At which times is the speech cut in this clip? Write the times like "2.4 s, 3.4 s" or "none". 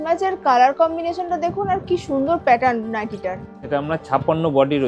3.5 s